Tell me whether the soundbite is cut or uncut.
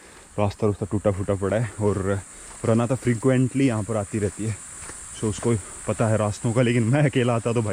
uncut